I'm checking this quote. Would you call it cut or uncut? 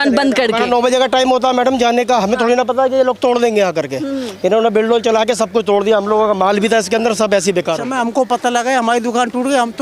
cut